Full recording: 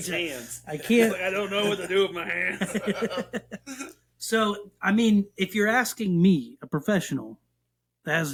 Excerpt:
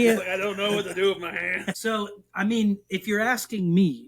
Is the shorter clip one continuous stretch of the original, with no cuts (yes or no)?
no